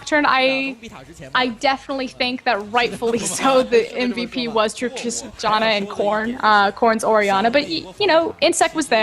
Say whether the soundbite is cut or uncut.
cut